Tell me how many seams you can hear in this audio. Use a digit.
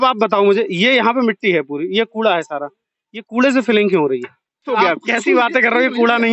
1